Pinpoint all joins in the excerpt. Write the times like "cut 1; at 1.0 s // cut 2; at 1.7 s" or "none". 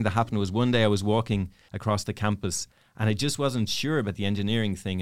cut 1; at 1.6 s